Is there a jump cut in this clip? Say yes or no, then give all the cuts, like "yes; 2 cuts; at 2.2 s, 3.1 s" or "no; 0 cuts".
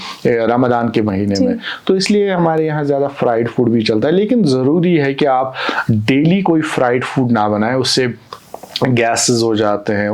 no; 0 cuts